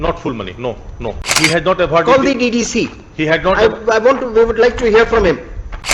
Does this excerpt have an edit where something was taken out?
yes; 1 cut; at 1.2 s

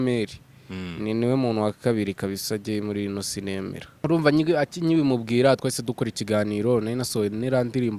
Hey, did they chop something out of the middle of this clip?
yes; 1 cut; at 3.8 s

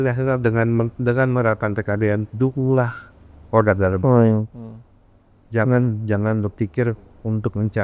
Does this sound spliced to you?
no; 0 cuts

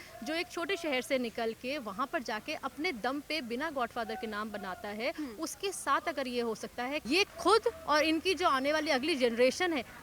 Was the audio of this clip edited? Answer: yes; 1 cut; at 7.0 s

